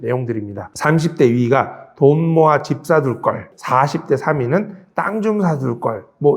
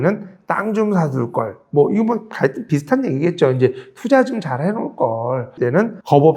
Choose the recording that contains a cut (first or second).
first